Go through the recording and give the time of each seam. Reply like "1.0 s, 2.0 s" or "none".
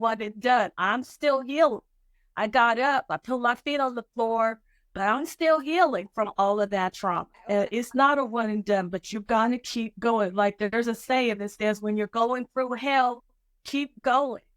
7.3 s